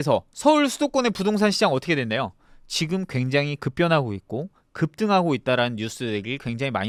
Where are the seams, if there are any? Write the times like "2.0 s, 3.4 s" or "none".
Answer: none